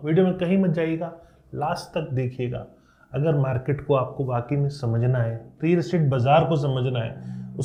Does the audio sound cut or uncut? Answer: uncut